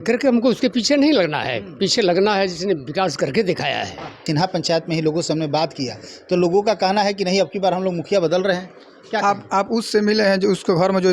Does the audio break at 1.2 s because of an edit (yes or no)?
no